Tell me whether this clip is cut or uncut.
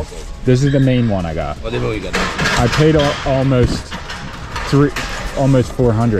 uncut